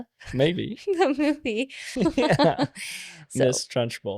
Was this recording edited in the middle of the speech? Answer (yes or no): yes